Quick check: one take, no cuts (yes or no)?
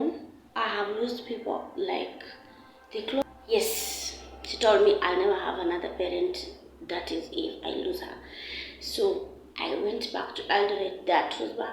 no